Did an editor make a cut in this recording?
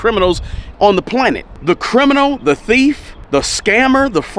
yes; 2 cuts; at 1.5 s, 3.1 s

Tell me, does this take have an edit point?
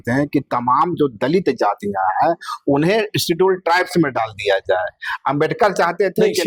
no; 0 cuts

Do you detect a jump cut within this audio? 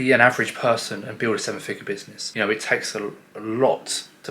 yes; 1 cut; at 2.2 s

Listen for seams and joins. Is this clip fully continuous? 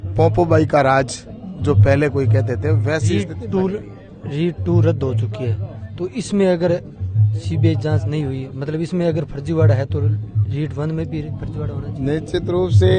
yes; 0 cuts

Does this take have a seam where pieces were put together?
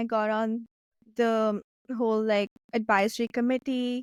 no; 0 cuts

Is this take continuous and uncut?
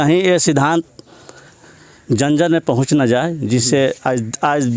yes; 0 cuts

